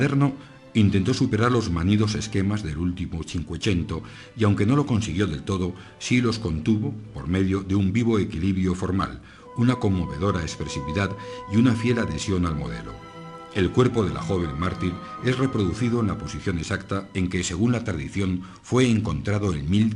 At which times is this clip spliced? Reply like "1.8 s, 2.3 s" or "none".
none